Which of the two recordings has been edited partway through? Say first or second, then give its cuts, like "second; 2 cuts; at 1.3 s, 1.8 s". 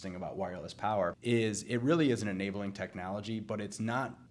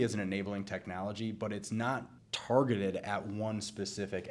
first; 1 cut; at 1.2 s